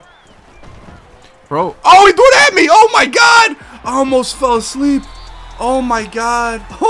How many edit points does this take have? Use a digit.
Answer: 0